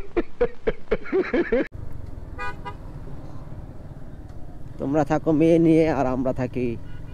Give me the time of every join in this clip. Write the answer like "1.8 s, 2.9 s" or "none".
1.8 s

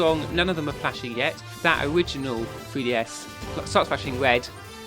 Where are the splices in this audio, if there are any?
1.5 s, 3.3 s

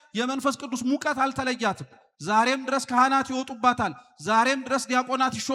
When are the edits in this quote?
none

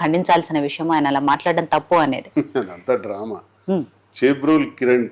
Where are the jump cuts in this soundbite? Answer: 2.2 s

